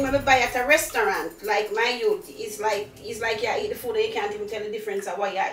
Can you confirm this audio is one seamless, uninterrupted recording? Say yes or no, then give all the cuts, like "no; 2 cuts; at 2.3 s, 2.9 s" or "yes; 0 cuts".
yes; 0 cuts